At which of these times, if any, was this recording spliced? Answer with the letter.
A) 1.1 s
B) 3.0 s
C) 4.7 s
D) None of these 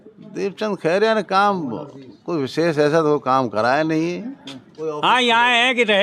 C